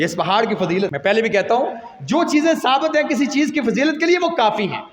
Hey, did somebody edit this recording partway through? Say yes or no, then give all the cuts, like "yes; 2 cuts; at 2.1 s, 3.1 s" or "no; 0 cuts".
yes; 1 cut; at 1.0 s